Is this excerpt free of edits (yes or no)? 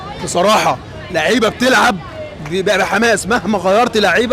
yes